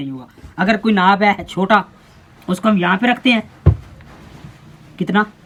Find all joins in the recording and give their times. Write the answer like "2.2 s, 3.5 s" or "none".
none